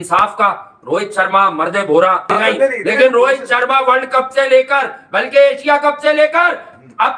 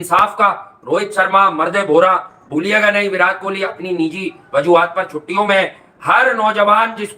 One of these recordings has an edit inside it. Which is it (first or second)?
first